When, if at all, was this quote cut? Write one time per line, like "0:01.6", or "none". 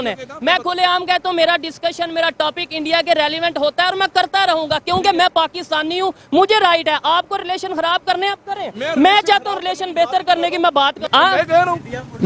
0:11.0